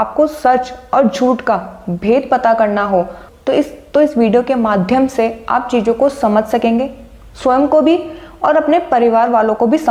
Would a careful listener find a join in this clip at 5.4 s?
no; 0 cuts

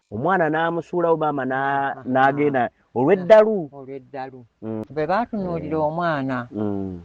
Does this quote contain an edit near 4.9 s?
yes; 1 cut; at 4.9 s

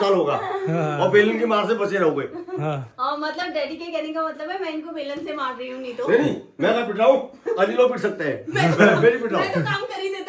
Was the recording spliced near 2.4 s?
no; 0 cuts

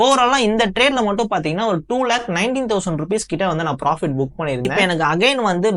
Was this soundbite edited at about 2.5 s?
no; 1 cut; at 4.7 s

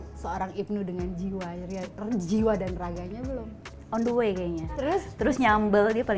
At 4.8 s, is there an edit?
yes; 1 cut; at 4.8 s

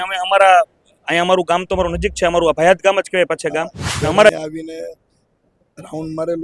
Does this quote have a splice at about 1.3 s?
no; 1 cut; at 4.3 s

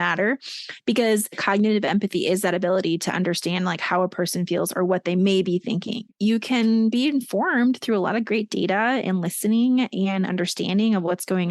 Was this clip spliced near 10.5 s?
no; 2 cuts; at 1.4 s, 6.0 s

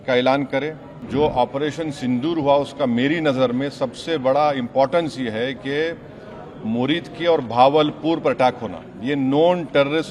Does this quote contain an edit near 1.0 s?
yes; 1 cut; at 1.0 s

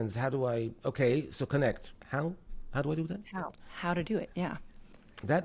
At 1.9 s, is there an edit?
yes; 1 cut; at 1.9 s

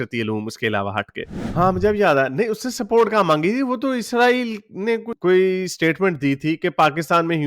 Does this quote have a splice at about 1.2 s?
yes; 1 cut; at 1.2 s

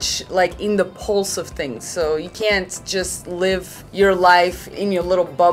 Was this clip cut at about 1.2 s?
no; 1 cut; at 3.8 s

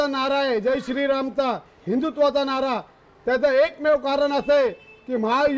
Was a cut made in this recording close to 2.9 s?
no; 0 cuts

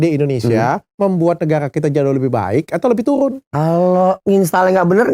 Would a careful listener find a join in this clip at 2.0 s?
no; 2 cuts; at 3.4 s, 4.2 s

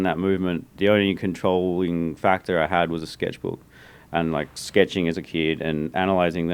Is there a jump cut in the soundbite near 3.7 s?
no; 0 cuts

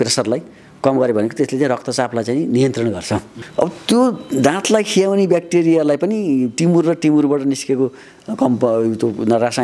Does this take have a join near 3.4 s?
yes; 1 cut; at 3.4 s

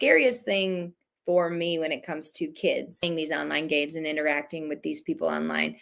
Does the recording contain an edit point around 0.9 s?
no; 1 cut; at 3.0 s

